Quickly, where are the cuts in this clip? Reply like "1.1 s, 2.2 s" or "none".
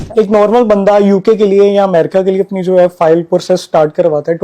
none